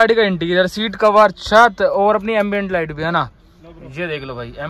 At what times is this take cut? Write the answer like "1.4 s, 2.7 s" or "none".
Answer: none